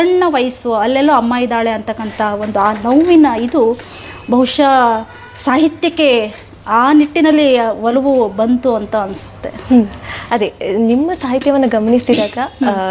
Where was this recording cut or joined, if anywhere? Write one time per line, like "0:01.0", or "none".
none